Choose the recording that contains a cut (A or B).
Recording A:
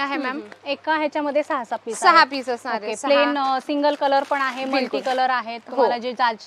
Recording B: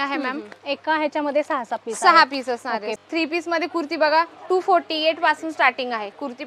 B